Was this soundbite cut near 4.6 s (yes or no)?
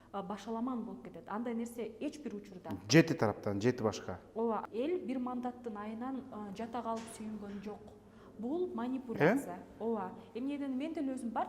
yes